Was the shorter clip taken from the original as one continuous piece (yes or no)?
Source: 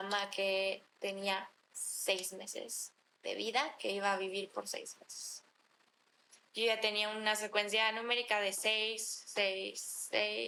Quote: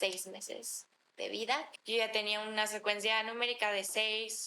no